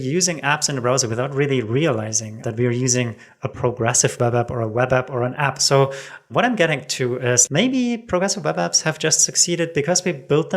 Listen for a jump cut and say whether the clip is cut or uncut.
cut